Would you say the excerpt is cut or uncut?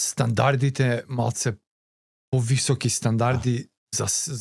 uncut